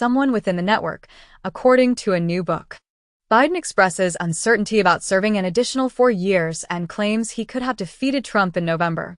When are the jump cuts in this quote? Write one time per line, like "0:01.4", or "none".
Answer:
none